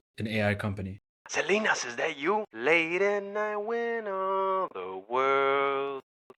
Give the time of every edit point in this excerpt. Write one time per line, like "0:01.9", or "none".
0:01.2
0:02.5